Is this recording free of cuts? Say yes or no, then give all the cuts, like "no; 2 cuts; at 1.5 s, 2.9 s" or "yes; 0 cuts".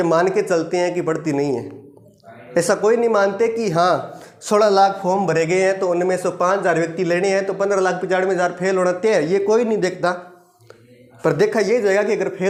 yes; 0 cuts